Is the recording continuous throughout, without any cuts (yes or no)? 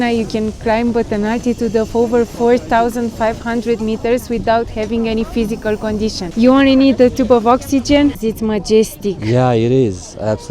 no